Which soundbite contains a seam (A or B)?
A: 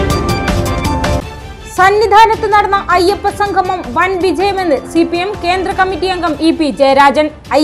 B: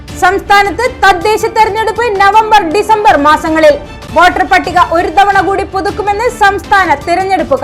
A